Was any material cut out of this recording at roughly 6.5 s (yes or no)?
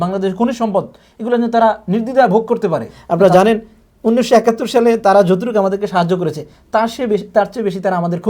no